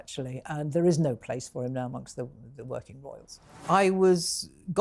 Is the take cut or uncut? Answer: cut